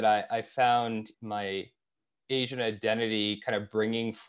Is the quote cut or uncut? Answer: cut